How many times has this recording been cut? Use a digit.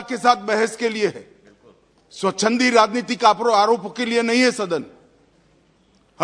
0